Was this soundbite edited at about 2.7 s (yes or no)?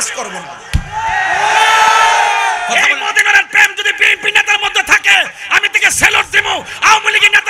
yes